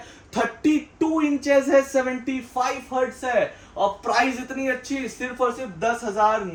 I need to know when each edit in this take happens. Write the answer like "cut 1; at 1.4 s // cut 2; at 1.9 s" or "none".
none